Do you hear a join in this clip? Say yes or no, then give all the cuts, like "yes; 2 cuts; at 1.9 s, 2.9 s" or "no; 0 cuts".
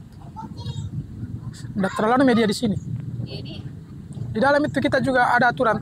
no; 0 cuts